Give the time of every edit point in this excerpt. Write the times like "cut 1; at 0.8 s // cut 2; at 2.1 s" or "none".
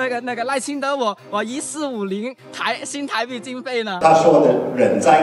cut 1; at 3.9 s